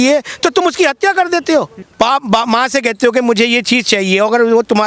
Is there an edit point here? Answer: yes; 1 cut; at 1.8 s

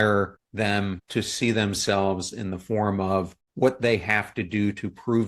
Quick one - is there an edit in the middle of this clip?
yes; 2 cuts; at 0.8 s, 3.4 s

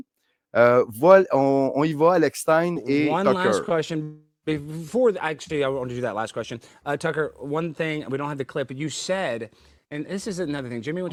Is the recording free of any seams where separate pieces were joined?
yes; 0 cuts

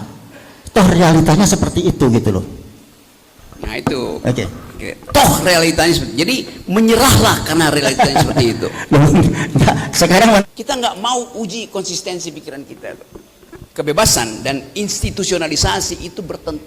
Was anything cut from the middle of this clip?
yes; 2 cuts; at 10.4 s, 13.7 s

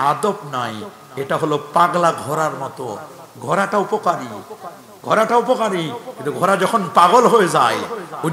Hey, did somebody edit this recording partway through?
no; 0 cuts

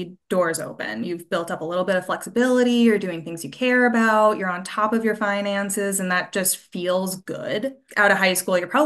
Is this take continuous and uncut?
no; 1 cut; at 7.8 s

